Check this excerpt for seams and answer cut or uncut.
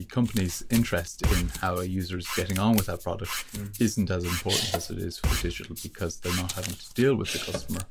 uncut